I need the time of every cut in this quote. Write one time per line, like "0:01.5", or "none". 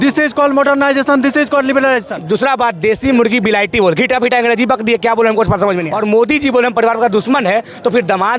0:02.1
0:05.9